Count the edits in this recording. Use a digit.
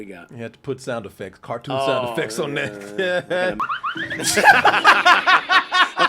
1